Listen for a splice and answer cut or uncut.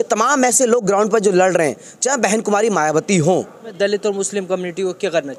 cut